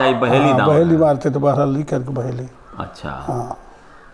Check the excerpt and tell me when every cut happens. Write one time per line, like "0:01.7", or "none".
none